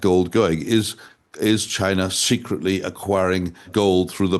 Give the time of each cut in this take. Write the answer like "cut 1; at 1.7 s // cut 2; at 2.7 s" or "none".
none